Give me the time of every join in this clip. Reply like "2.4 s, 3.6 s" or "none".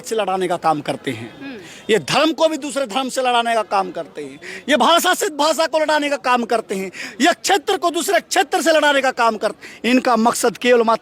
none